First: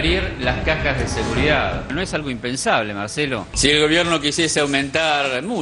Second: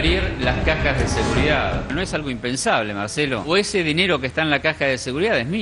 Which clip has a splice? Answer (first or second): first